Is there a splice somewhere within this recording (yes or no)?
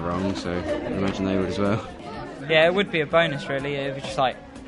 yes